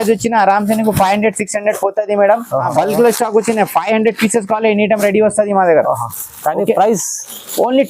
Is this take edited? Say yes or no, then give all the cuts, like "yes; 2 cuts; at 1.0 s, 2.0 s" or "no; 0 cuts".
yes; 1 cut; at 2.7 s